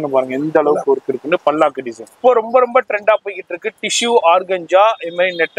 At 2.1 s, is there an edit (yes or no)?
yes